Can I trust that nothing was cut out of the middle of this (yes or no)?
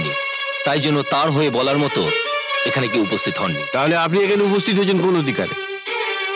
yes